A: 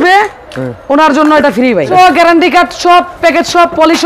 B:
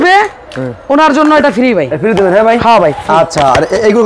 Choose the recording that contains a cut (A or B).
A